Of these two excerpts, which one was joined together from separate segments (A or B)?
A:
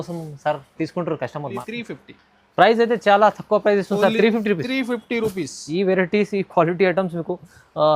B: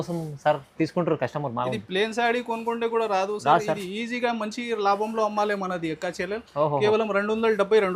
A